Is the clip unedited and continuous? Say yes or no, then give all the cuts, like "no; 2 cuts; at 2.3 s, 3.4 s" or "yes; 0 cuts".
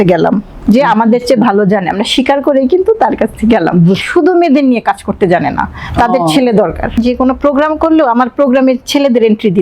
no; 2 cuts; at 4.0 s, 7.0 s